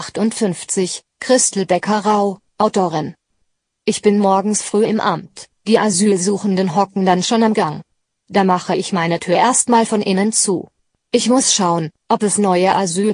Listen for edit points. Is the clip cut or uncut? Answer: cut